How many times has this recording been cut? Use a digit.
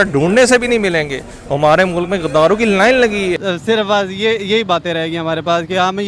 1